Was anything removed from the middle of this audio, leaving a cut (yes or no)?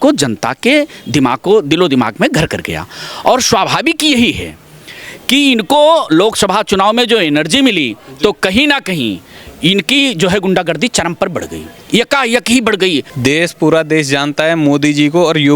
yes